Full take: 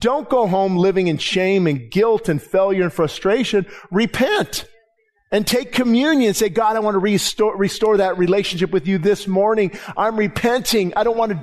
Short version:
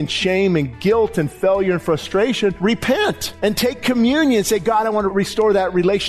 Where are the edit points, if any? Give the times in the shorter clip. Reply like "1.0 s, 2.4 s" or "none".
2.6 s, 3.3 s, 5.1 s